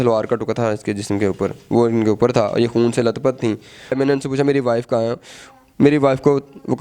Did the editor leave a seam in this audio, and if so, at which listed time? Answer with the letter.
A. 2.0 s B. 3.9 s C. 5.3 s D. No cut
B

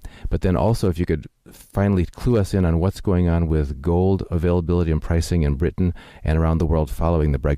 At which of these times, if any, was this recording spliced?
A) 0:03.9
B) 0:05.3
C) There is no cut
B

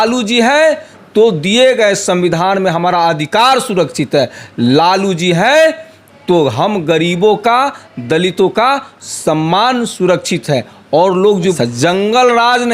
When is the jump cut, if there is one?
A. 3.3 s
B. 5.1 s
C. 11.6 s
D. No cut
C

